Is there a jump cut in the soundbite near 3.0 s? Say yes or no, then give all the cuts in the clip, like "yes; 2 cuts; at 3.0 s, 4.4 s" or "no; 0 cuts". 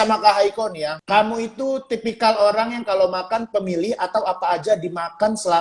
no; 1 cut; at 0.9 s